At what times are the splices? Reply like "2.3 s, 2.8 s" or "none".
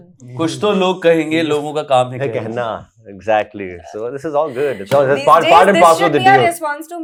none